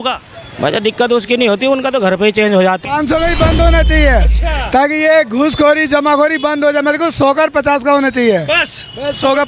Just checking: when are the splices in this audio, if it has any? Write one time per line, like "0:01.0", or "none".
0:02.8